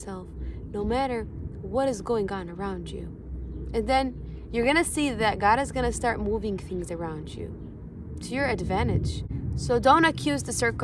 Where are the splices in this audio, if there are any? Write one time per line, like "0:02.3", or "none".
0:09.3